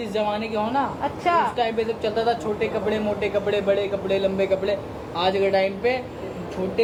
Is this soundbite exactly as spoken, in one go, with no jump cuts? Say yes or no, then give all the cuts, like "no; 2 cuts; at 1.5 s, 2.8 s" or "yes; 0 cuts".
yes; 0 cuts